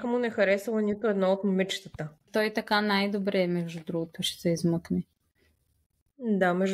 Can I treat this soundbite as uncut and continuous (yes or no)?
no